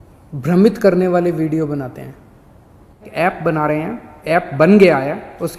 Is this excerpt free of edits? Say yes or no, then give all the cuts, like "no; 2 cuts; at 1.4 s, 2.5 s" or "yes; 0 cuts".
no; 1 cut; at 3.1 s